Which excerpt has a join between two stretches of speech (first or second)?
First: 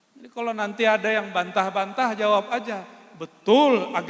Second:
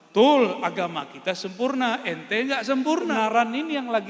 second